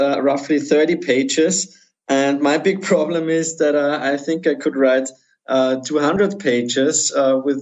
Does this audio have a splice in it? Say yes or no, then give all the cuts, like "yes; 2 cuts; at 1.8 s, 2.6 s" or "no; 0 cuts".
no; 0 cuts